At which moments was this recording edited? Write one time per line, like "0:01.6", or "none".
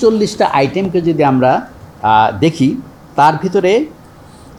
none